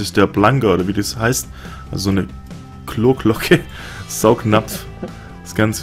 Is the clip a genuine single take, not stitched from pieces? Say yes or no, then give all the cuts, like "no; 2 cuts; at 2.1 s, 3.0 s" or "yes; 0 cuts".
yes; 0 cuts